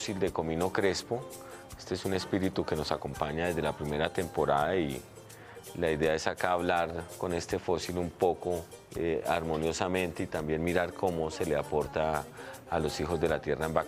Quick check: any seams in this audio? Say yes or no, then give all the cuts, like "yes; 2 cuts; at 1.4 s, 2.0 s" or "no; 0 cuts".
yes; 1 cut; at 10.7 s